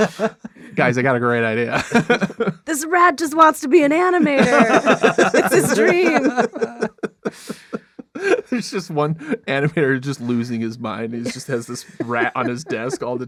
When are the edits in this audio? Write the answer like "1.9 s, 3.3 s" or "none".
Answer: none